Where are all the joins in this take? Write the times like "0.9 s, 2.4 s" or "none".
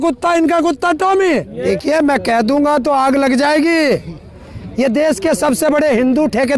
1.5 s